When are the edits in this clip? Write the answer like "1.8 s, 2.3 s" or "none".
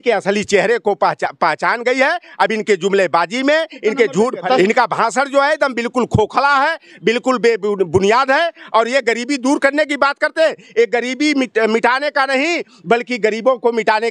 none